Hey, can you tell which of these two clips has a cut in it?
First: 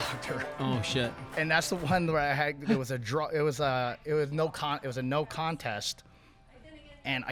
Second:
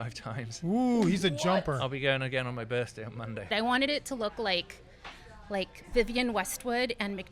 second; 1 cut; at 3.5 s

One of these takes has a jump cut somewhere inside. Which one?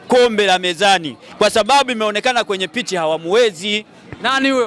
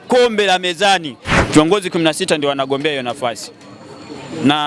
second; 1 cut; at 1.3 s

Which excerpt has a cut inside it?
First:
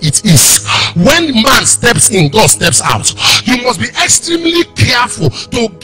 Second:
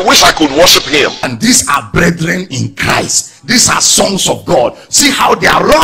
second; 1 cut; at 1.2 s

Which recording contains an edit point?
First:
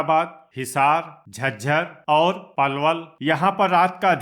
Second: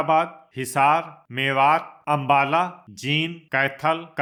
first; 1 cut; at 1.4 s

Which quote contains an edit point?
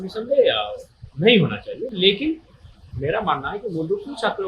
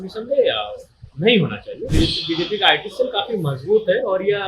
second; 1 cut; at 1.9 s

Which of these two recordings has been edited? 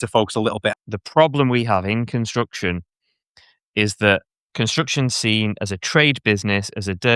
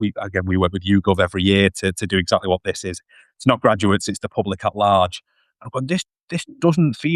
first; 2 cuts; at 0.8 s, 4.4 s

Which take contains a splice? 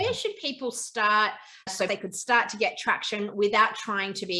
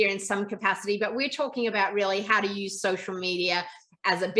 first; 1 cut; at 1.8 s

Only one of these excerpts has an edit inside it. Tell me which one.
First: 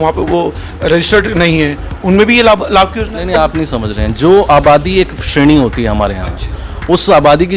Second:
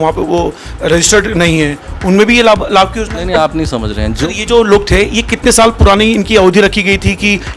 second; 1 cut; at 4.2 s

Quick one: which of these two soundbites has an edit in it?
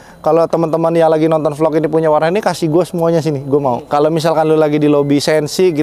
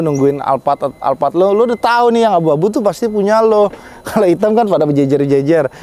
first; 1 cut; at 3.8 s

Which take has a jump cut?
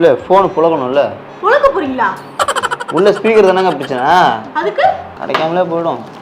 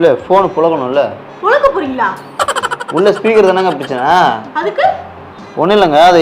first; 1 cut; at 5.1 s

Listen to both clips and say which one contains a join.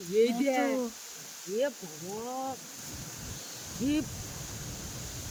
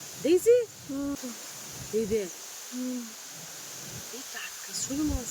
second; 1 cut; at 1.2 s

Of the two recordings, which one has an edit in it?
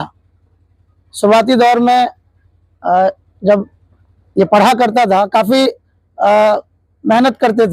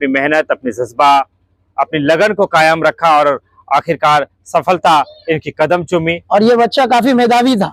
second; 1 cut; at 6.2 s

